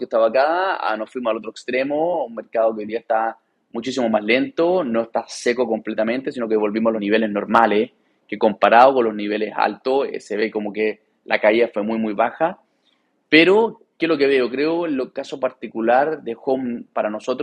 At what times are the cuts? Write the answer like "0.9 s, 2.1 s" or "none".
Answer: 7.0 s

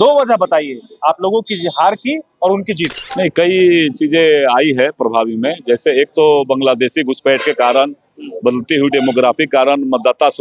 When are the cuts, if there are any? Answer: 3.0 s

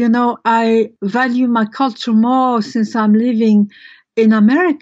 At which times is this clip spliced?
0.9 s

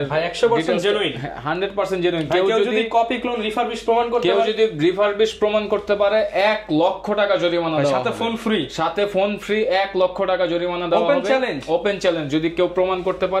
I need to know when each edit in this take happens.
none

